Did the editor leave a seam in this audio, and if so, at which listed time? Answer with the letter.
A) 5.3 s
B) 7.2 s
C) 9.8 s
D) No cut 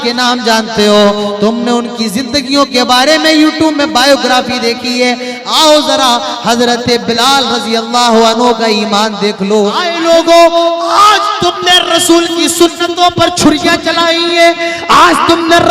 C